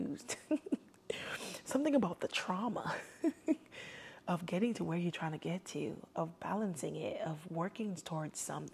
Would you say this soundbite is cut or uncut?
uncut